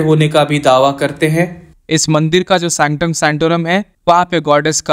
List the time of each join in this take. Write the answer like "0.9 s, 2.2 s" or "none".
1.7 s